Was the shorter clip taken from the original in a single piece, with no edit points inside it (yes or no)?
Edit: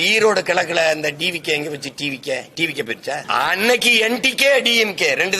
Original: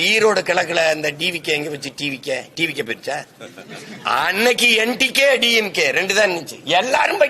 no